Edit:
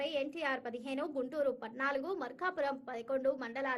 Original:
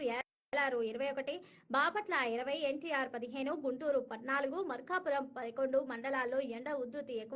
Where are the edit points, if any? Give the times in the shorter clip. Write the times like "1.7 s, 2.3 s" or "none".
none